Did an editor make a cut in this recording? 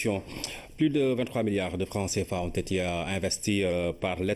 no; 0 cuts

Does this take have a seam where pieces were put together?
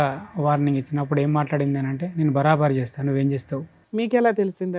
yes; 1 cut; at 3.8 s

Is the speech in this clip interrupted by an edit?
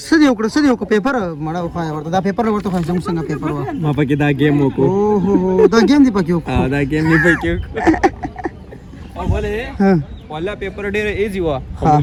no; 0 cuts

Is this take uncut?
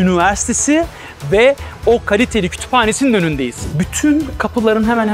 no; 1 cut; at 3.7 s

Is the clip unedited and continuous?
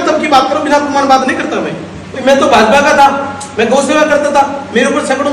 yes; 0 cuts

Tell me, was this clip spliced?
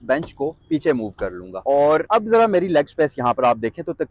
yes; 2 cuts; at 1.5 s, 2.1 s

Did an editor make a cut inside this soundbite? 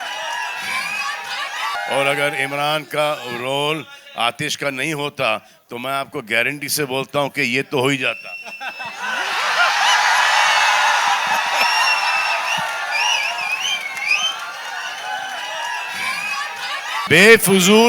yes; 2 cuts; at 1.8 s, 17.0 s

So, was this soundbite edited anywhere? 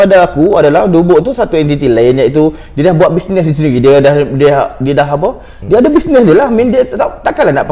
no; 0 cuts

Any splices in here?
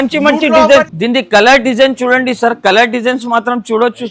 yes; 1 cut; at 0.9 s

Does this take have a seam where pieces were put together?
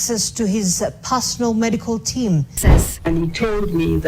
yes; 1 cut; at 2.6 s

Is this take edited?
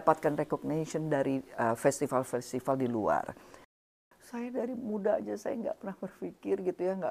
yes; 1 cut; at 3.8 s

